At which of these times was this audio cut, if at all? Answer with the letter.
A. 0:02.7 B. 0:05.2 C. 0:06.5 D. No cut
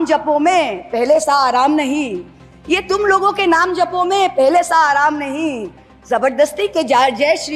D